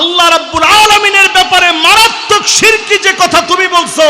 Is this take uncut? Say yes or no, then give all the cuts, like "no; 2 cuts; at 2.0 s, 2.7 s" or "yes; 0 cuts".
yes; 0 cuts